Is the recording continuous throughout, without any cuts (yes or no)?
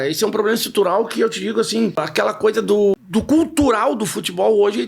no